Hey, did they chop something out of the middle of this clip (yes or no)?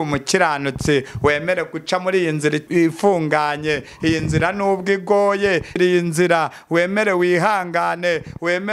yes